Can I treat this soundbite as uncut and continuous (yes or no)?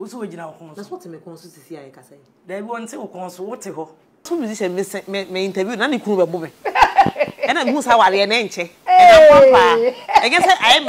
no